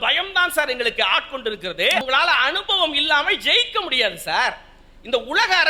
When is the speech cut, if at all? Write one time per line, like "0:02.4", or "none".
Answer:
0:02.0